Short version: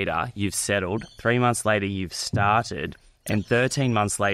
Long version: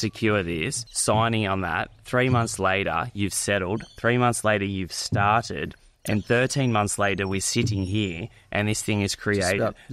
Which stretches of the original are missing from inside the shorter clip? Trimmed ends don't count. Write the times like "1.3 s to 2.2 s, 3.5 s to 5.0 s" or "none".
none